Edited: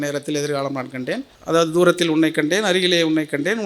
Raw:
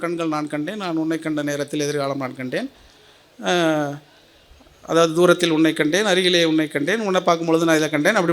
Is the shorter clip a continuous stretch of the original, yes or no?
no